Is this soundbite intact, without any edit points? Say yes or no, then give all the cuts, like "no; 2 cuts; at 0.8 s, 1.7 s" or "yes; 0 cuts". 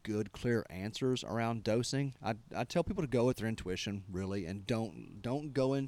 yes; 0 cuts